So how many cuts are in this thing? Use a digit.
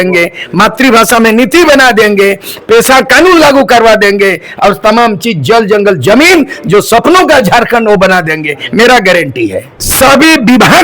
1